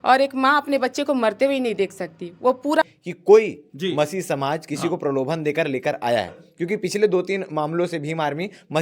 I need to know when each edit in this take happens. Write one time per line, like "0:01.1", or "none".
0:02.8

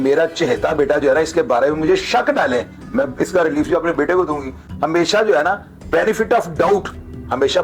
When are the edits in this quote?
none

